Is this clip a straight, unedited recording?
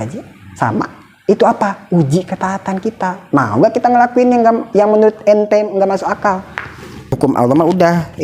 no; 1 cut; at 7.1 s

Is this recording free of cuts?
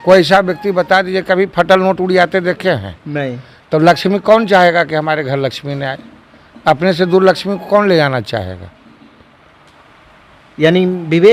yes; 0 cuts

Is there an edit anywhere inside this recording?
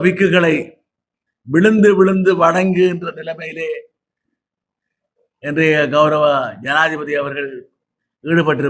no; 0 cuts

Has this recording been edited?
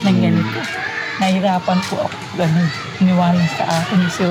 no; 0 cuts

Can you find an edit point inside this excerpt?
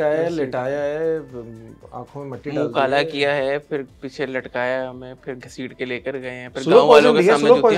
no; 0 cuts

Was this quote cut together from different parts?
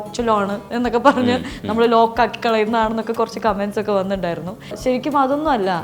yes; 1 cut; at 4.8 s

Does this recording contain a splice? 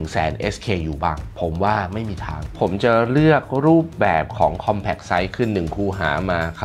yes; 2 cuts; at 1.3 s, 2.5 s

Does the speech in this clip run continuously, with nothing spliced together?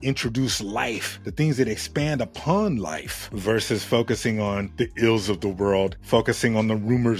yes; 0 cuts

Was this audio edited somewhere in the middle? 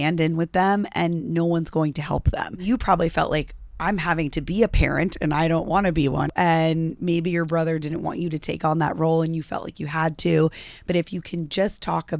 yes; 2 cuts; at 2.6 s, 6.3 s

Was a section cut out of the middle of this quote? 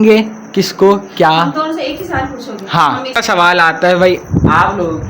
yes; 1 cut; at 3.2 s

